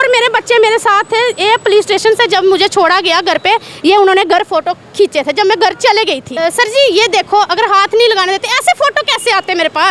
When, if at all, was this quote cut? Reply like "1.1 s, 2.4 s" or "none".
6.2 s